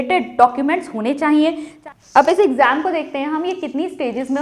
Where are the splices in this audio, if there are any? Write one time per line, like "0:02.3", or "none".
0:01.7